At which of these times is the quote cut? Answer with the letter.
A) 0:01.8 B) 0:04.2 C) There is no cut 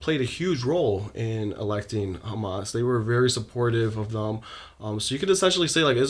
C